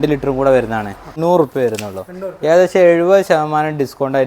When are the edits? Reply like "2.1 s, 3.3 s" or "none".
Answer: 1.1 s